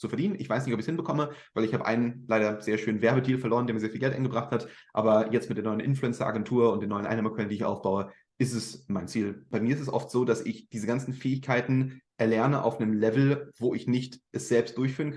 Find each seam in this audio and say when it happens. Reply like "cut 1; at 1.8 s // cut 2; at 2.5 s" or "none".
cut 1; at 9.5 s

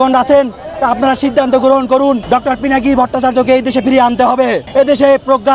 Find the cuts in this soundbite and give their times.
cut 1; at 2.2 s // cut 2; at 4.6 s

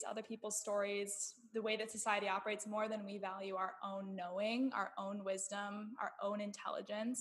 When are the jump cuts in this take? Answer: none

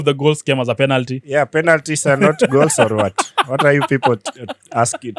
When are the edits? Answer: none

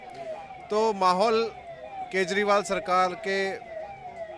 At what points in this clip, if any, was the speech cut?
none

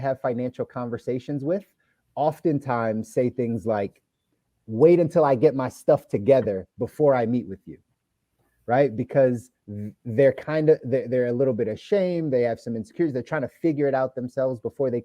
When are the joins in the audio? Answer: none

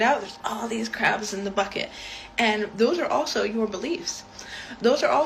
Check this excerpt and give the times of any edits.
none

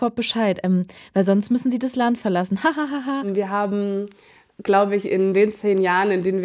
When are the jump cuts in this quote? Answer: cut 1; at 3.3 s

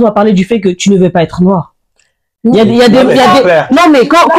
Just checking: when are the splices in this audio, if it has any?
none

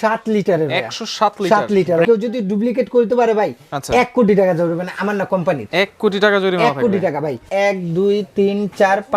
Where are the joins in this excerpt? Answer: cut 1; at 2.1 s // cut 2; at 7.4 s

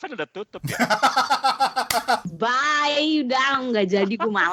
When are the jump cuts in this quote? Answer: none

